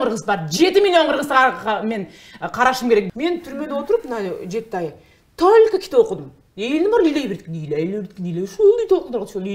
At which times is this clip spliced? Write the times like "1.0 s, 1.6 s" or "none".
3.1 s